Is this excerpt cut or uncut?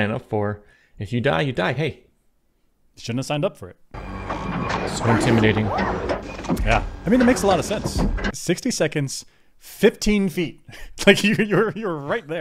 cut